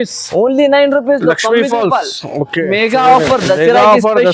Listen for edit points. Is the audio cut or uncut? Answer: cut